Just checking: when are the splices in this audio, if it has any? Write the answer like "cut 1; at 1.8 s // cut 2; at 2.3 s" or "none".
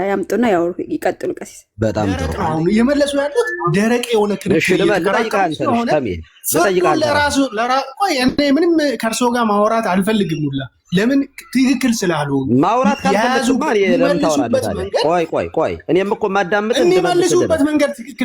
cut 1; at 2.3 s